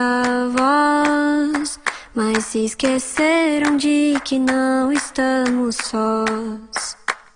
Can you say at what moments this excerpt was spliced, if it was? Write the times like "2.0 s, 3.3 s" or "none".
none